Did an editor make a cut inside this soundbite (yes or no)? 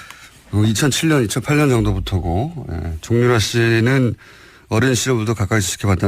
yes